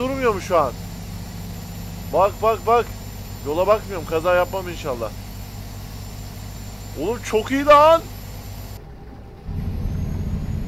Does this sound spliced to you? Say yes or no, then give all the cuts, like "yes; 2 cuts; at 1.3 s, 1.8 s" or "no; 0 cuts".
yes; 1 cut; at 8.8 s